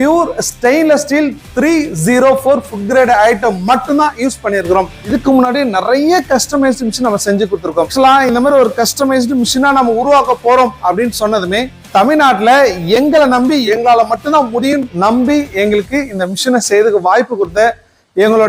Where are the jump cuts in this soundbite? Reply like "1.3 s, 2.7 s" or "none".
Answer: 5.0 s, 7.9 s, 11.8 s, 13.6 s, 14.9 s